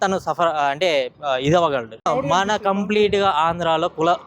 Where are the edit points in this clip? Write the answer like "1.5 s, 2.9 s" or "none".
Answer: 2.1 s